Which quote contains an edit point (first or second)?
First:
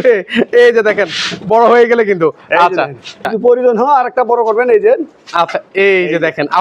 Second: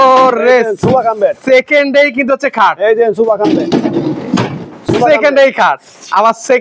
first